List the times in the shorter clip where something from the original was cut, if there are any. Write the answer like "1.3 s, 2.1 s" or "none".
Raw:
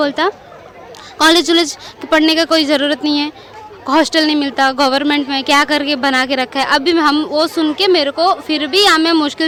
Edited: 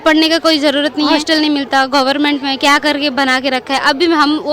1.2 s